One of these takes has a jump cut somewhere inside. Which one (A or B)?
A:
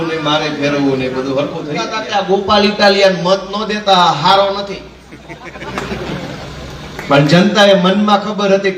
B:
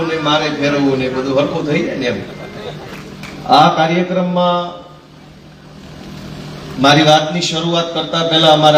A